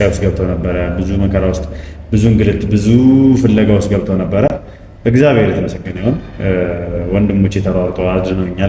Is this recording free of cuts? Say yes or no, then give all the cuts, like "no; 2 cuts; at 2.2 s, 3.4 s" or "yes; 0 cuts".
yes; 0 cuts